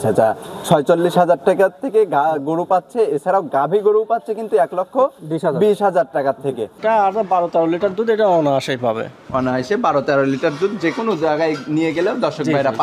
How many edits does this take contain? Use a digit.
1